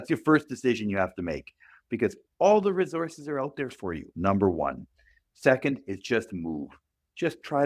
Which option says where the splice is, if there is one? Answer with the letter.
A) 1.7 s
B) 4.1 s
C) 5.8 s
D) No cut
B